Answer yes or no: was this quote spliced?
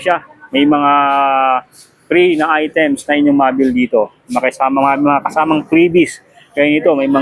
no